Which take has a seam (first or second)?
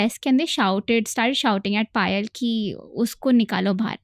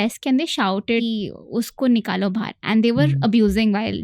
second